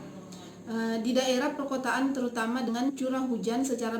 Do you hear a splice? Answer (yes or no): yes